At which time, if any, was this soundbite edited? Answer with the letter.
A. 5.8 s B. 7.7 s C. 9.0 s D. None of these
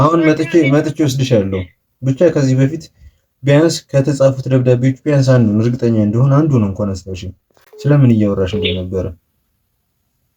D